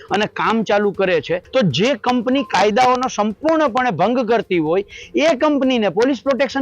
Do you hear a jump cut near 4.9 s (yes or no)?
no